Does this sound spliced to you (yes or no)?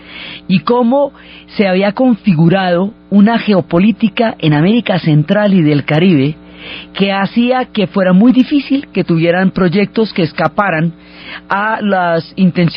yes